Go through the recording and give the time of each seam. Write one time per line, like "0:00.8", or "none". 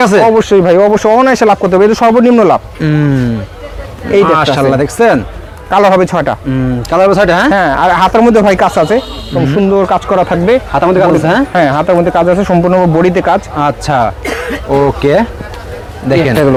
none

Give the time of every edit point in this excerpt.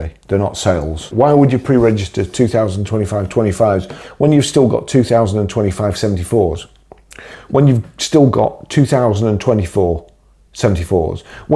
0:01.0

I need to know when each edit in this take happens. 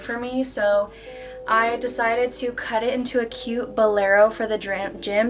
none

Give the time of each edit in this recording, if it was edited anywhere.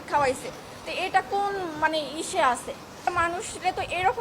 0:03.0

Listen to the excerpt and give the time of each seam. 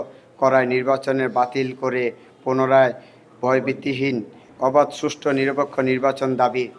0:04.4

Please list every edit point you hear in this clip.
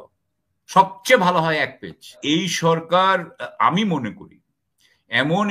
0:02.2

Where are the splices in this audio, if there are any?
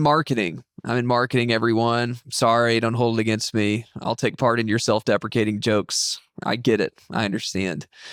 none

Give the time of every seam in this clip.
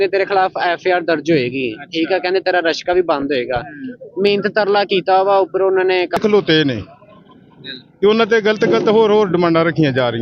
0:06.2

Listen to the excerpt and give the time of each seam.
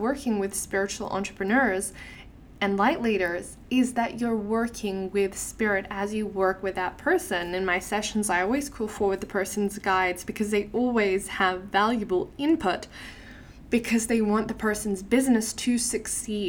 none

